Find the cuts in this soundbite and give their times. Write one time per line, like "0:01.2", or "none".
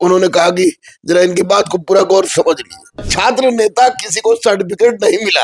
0:03.1